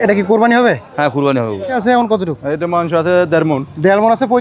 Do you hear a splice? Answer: yes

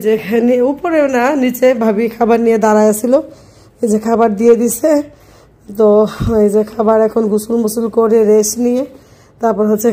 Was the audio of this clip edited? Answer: no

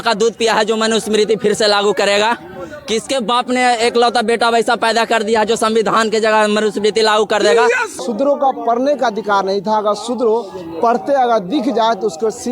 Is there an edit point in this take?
yes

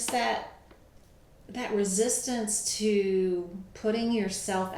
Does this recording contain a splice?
no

